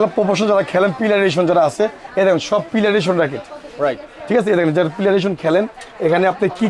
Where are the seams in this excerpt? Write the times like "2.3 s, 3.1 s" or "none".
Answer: none